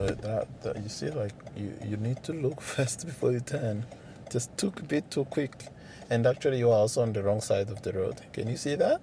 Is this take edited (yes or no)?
no